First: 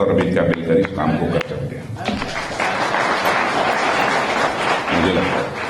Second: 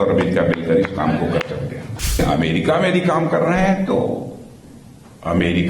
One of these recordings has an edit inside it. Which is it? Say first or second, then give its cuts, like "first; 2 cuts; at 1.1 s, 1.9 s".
second; 1 cut; at 2.2 s